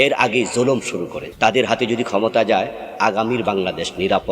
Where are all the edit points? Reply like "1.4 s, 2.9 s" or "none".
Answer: 1.2 s